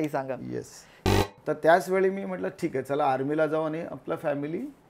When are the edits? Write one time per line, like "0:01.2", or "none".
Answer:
0:01.0